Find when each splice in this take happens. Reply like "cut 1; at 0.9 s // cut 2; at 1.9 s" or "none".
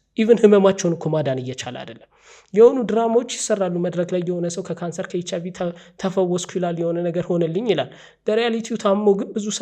none